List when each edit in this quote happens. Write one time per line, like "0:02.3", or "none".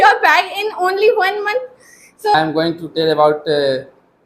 0:02.3